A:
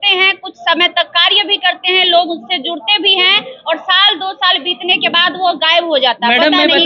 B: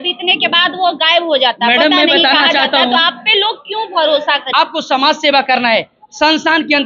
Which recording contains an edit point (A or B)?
B